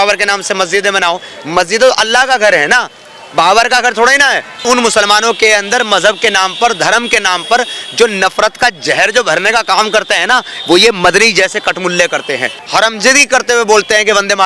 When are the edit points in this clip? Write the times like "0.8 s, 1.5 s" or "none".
4.6 s, 12.5 s